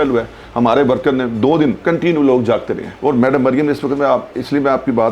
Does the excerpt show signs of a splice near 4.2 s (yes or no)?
no